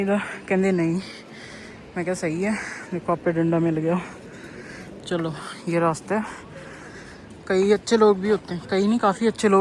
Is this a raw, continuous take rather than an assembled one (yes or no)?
yes